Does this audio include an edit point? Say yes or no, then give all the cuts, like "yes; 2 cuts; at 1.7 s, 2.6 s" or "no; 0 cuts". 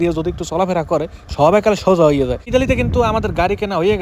yes; 1 cut; at 2.5 s